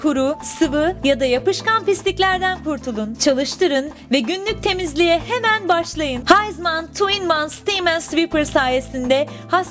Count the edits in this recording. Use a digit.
1